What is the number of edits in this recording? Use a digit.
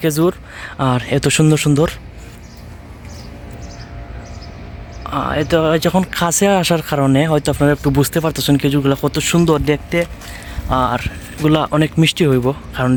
0